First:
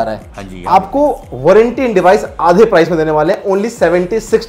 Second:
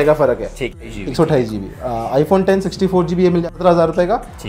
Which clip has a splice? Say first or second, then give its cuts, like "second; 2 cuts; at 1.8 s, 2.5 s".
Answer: second; 2 cuts; at 0.8 s, 3.4 s